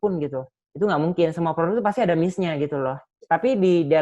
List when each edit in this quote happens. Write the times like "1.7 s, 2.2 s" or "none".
3.1 s

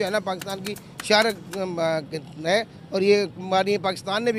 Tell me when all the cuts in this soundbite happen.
none

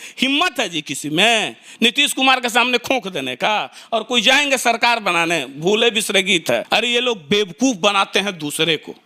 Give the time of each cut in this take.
6.6 s

